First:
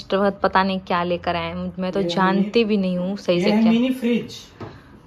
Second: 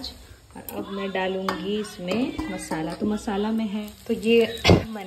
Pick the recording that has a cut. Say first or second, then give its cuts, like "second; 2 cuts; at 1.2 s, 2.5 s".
second; 1 cut; at 3.9 s